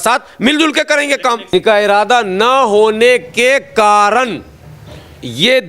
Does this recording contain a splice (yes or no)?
yes